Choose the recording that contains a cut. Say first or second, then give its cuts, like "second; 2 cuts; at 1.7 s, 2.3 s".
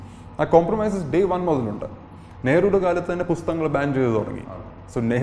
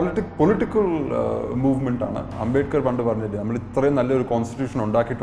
second; 1 cut; at 2.3 s